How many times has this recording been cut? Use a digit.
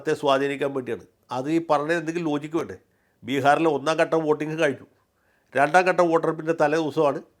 0